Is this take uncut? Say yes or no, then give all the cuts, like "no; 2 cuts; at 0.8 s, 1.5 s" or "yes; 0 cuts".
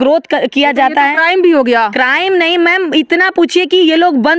yes; 0 cuts